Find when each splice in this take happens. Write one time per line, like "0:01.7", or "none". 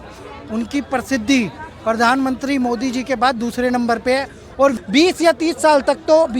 0:04.8